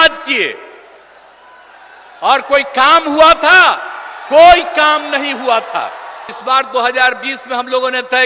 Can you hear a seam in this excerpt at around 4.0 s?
no; 1 cut; at 6.3 s

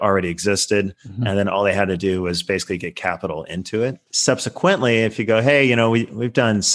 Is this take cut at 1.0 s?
no; 1 cut; at 4.1 s

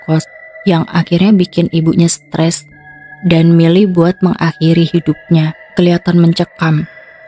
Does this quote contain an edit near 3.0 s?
no; 1 cut; at 5.7 s

